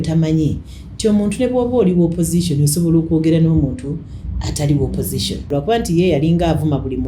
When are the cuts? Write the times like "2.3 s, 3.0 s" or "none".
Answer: 5.5 s